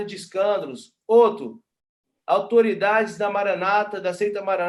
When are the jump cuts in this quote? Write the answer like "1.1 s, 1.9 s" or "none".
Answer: none